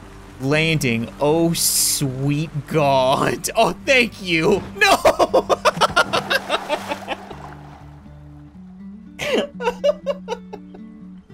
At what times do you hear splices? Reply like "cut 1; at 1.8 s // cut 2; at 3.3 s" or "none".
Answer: cut 1; at 10.4 s